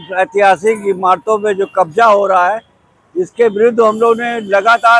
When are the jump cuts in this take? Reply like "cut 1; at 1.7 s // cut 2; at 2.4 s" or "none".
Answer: none